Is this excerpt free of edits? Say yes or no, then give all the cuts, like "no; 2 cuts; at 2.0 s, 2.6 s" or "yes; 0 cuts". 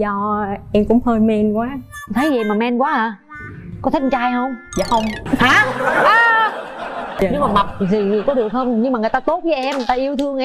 no; 2 cuts; at 5.2 s, 7.1 s